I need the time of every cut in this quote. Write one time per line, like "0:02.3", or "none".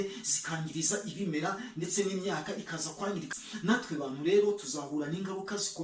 0:03.3